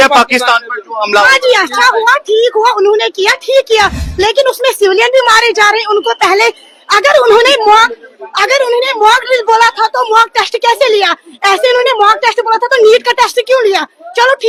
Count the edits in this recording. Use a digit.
0